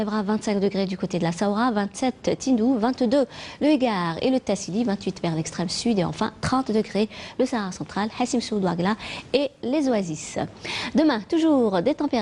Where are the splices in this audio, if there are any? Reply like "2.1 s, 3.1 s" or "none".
none